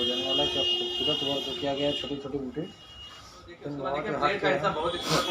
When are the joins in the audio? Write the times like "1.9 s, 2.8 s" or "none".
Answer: 3.7 s